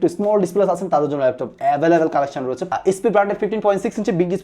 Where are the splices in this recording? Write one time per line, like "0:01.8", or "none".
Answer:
0:02.7